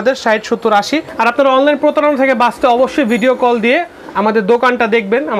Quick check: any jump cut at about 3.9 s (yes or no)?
no